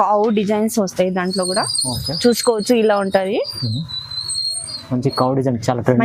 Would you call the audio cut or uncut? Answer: uncut